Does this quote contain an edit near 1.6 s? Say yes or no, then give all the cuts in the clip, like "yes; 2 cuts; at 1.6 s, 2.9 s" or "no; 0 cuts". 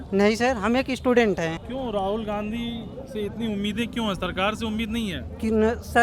yes; 1 cut; at 1.6 s